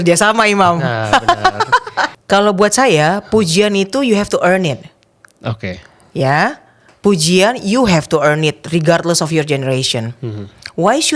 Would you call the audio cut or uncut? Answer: cut